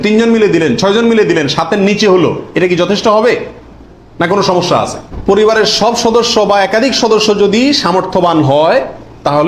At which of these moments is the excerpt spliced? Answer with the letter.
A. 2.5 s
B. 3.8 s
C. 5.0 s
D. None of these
C